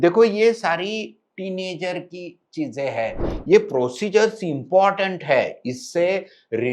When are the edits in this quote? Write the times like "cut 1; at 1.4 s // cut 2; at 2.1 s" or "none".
cut 1; at 3.3 s